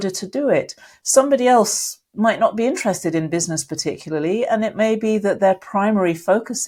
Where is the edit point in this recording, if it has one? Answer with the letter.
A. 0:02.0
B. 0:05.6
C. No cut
C